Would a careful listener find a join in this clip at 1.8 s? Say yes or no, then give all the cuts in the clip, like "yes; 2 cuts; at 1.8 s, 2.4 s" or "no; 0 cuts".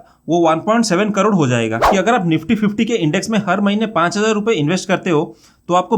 yes; 1 cut; at 1.8 s